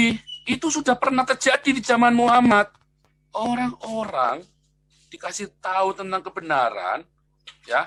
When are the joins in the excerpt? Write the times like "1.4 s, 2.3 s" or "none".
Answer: none